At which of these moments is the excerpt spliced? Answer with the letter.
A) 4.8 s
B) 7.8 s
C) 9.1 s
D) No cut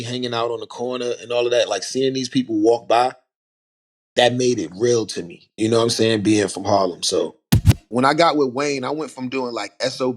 B